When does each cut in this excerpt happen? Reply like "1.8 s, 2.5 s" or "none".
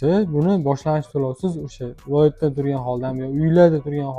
none